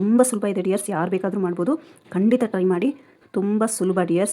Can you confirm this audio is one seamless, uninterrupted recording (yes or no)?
no